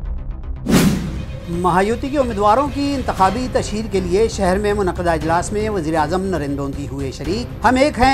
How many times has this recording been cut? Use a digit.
1